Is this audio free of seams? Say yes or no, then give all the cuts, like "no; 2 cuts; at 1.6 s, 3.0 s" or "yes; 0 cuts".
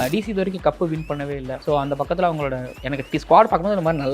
no; 2 cuts; at 1.5 s, 2.7 s